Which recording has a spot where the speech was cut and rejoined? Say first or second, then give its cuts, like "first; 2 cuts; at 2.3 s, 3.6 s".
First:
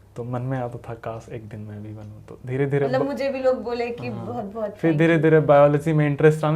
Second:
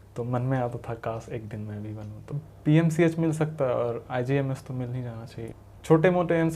second; 2 cuts; at 2.3 s, 5.4 s